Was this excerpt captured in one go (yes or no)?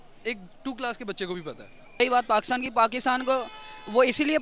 no